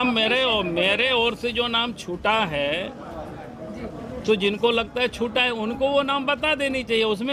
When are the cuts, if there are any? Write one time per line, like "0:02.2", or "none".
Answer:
none